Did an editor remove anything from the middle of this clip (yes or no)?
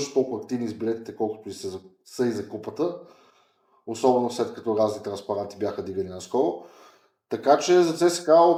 no